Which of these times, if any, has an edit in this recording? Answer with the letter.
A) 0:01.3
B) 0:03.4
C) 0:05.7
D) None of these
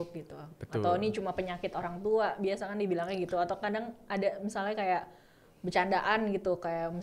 D